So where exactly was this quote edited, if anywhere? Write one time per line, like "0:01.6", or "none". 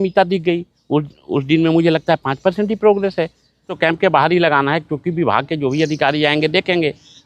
0:03.7